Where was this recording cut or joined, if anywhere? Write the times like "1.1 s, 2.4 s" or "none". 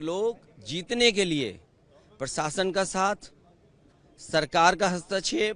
none